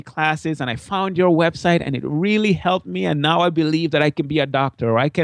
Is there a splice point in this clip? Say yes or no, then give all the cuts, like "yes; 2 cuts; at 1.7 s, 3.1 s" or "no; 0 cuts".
no; 0 cuts